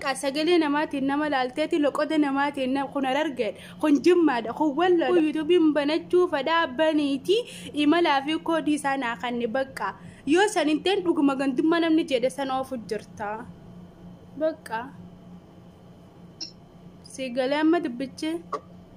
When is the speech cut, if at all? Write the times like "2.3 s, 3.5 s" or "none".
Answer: 5.1 s